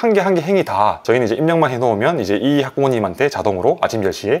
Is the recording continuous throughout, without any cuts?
no; 1 cut; at 1.0 s

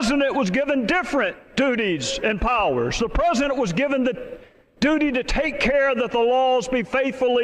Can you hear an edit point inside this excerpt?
yes; 1 cut; at 4.7 s

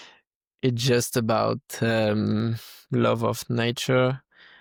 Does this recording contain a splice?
no; 0 cuts

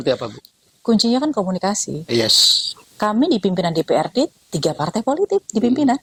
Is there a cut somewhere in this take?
no; 0 cuts

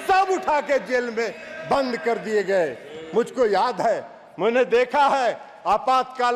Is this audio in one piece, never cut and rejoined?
yes; 0 cuts

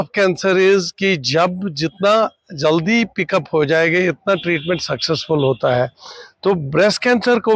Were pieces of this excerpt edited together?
no; 0 cuts

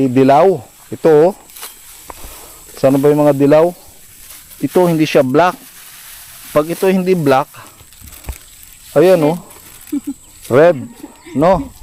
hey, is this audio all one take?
yes; 0 cuts

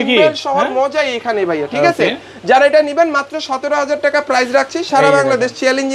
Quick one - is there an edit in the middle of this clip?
no; 0 cuts

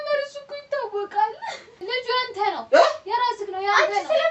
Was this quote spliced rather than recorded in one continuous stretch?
yes; 1 cut; at 1.8 s

